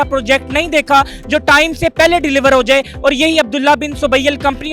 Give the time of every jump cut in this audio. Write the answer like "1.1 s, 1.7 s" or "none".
none